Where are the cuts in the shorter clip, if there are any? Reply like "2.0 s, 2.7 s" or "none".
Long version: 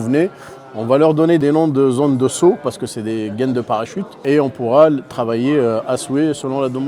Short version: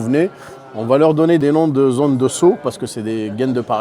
none